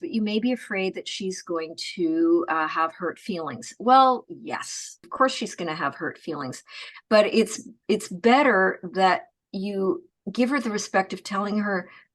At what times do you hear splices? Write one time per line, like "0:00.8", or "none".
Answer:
0:05.0
0:10.2